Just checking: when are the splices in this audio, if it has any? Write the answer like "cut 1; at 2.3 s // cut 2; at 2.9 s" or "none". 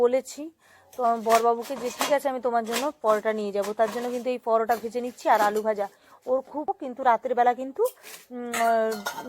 cut 1; at 6.7 s